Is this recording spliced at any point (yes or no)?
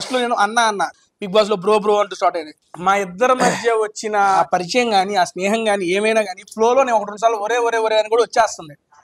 yes